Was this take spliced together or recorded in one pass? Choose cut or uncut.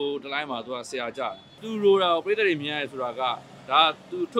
cut